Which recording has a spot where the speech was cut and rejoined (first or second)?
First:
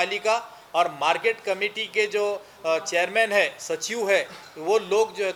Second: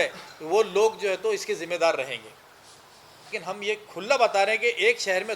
second